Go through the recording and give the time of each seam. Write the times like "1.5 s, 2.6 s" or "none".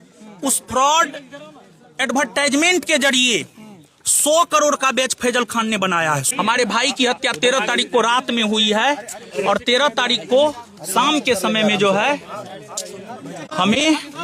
6.3 s